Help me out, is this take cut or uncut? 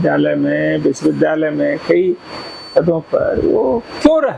uncut